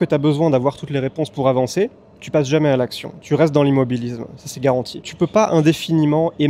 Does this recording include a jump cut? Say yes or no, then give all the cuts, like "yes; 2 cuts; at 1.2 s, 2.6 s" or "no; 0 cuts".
yes; 1 cut; at 5.0 s